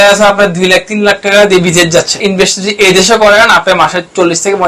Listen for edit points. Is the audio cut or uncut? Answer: cut